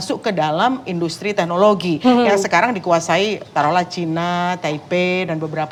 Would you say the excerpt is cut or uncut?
uncut